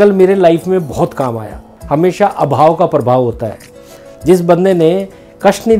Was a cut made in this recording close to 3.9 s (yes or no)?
no